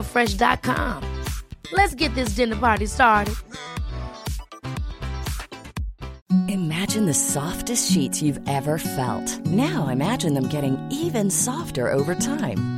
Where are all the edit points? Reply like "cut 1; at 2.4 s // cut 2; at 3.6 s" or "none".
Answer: cut 1; at 6.1 s